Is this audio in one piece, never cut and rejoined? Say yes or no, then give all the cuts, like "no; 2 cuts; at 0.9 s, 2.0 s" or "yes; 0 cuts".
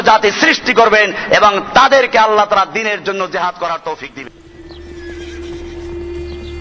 no; 1 cut; at 4.4 s